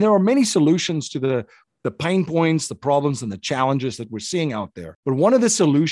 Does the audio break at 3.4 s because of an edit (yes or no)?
no